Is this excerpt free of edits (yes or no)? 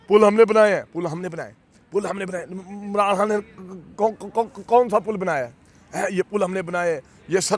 yes